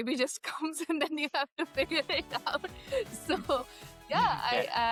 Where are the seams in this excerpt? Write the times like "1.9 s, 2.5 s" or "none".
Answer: none